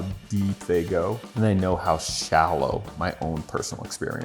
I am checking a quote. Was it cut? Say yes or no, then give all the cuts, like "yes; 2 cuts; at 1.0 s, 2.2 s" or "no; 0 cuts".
yes; 1 cut; at 1.2 s